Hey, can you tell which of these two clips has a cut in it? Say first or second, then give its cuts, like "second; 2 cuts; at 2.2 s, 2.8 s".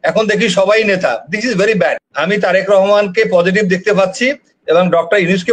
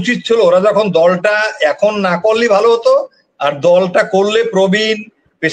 first; 1 cut; at 2.1 s